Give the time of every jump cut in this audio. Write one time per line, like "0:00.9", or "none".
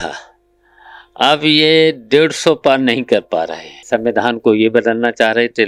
0:03.9